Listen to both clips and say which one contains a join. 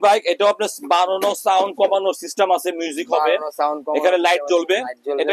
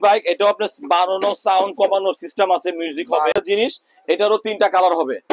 second; 1 cut; at 3.4 s

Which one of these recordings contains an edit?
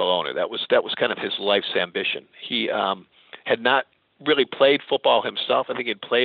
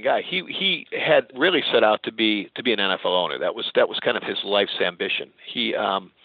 second; 1 cut; at 1.3 s

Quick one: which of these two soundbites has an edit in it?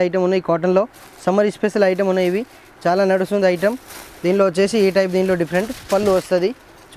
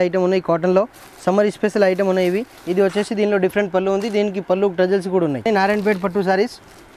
second; 2 cuts; at 2.6 s, 5.5 s

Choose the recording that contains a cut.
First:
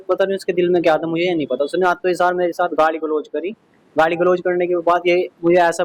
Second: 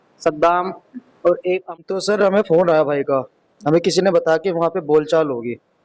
second; 1 cut; at 1.8 s

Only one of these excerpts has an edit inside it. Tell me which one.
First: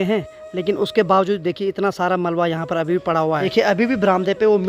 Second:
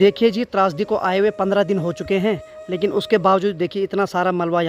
first; 1 cut; at 3.5 s

